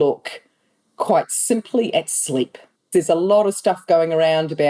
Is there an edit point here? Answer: yes; 1 cut; at 2.8 s

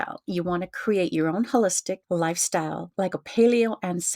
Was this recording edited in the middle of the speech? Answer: yes; 2 cuts; at 2.0 s, 2.9 s

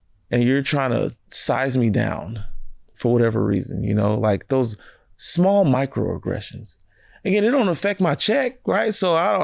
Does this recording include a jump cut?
no; 0 cuts

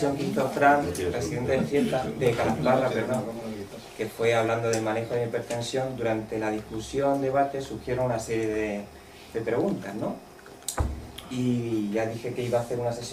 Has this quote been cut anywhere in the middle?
yes; 1 cut; at 10.8 s

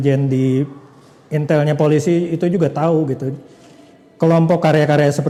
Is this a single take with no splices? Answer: yes; 0 cuts

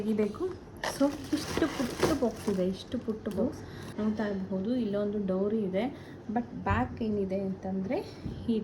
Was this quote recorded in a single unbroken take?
no; 1 cut; at 3.4 s

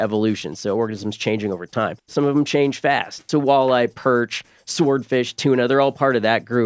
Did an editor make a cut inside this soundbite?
yes; 2 cuts; at 2.1 s, 3.2 s

